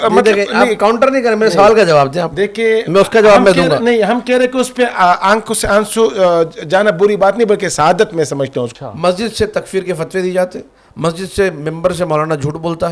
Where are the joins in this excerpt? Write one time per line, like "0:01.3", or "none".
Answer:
0:08.7